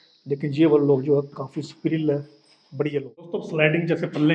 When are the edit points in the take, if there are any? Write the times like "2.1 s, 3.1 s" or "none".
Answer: 3.5 s